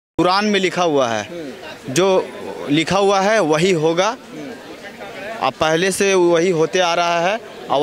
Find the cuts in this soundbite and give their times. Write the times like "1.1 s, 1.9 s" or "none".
none